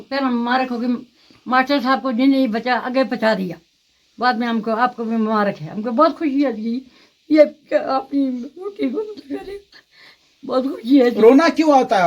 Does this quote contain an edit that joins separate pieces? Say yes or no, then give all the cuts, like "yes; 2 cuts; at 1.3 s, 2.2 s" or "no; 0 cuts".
no; 0 cuts